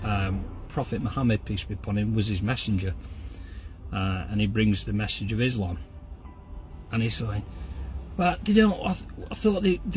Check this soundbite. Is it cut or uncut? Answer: uncut